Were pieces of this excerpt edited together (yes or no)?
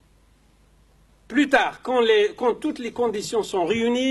no